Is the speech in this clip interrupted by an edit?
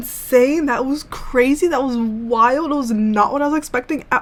no; 0 cuts

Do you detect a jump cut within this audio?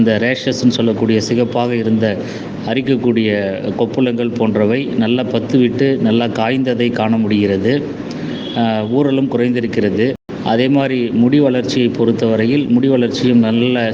yes; 1 cut; at 10.2 s

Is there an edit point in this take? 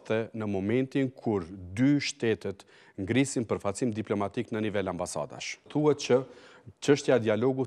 yes; 1 cut; at 5.7 s

